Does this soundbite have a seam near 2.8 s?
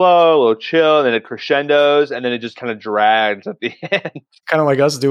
no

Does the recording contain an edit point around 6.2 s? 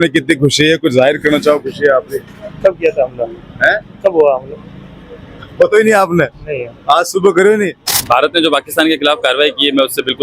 no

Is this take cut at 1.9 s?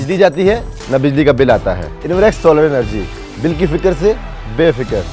yes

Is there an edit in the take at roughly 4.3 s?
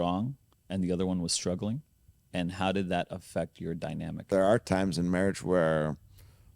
yes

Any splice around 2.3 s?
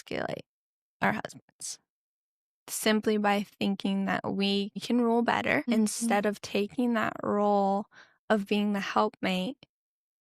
no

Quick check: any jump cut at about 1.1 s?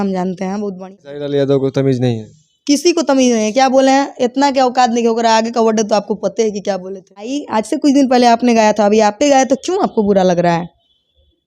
yes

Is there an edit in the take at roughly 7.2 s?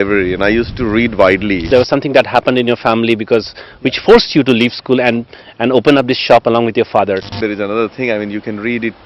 yes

